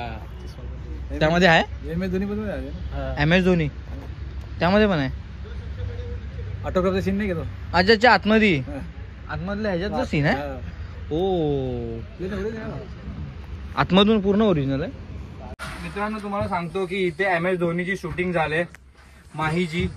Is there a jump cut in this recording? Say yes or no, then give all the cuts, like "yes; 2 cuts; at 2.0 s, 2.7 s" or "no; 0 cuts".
yes; 1 cut; at 15.6 s